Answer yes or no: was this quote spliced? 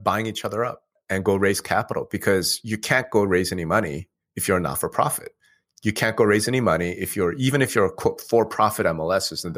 yes